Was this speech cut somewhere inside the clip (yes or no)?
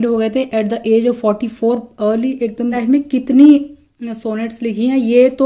yes